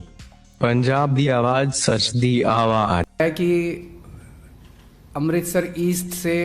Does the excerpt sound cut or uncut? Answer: cut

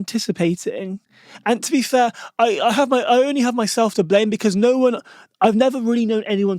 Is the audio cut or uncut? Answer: uncut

